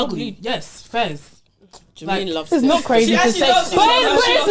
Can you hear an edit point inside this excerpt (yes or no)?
no